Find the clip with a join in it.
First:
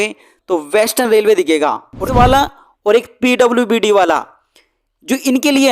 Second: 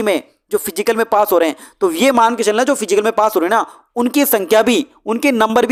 first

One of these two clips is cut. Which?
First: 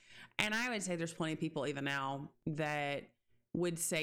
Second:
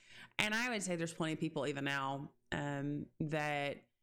first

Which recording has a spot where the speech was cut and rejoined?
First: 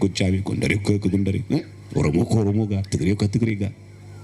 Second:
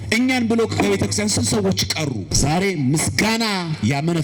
second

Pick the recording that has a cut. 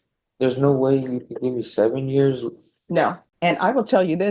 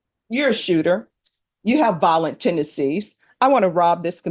first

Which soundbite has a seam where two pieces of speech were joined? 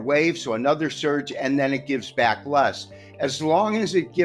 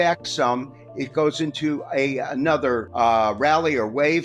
second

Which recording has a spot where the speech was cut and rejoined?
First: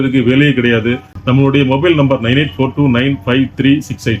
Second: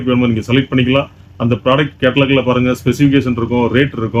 first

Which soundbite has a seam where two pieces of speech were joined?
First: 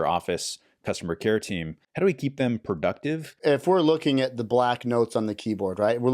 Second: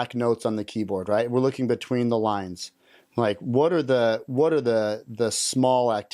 first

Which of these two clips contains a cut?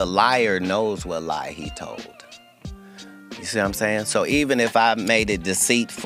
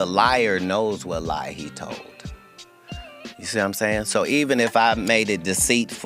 second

